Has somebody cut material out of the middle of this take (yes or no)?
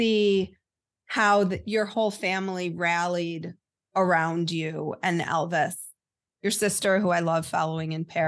no